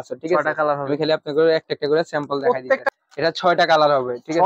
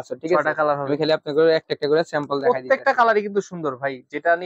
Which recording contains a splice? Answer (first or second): first